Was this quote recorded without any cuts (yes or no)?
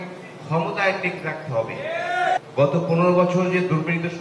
no